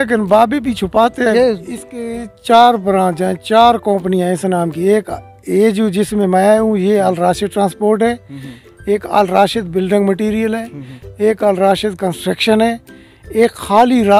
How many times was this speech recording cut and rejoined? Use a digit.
1